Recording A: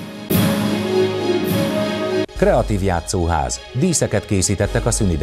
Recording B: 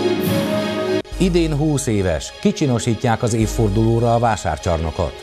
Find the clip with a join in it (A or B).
B